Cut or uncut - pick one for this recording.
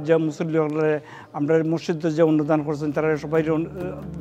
uncut